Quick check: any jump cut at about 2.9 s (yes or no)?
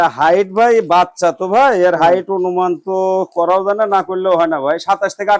no